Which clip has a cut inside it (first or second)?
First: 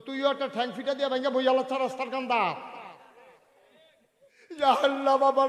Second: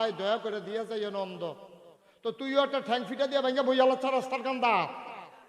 first